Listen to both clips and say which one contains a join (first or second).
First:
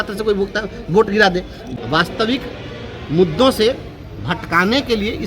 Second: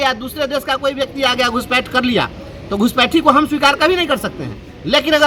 first